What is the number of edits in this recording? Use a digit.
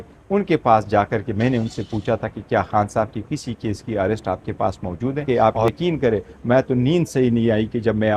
1